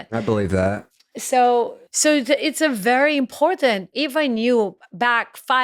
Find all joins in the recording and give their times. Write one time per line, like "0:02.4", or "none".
0:01.8
0:03.9